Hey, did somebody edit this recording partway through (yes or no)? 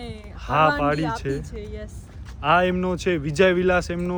no